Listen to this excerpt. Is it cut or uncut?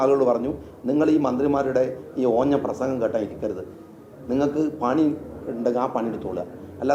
uncut